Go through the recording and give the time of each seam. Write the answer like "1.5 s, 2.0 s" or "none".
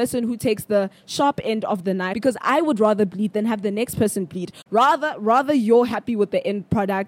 2.1 s, 4.5 s